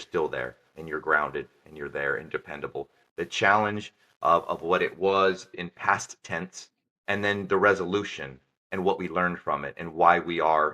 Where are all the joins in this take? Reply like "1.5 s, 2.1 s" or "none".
3.0 s, 5.6 s